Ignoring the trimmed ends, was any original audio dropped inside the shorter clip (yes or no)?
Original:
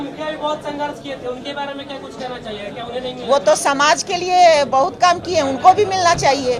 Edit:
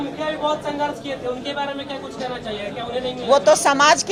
no